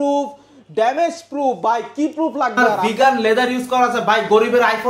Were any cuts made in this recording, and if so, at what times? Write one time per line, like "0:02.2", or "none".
0:02.7